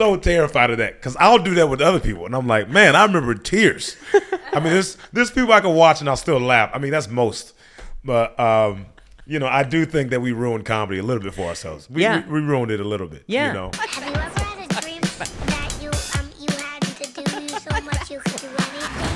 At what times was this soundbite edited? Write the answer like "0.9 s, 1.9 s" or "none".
13.7 s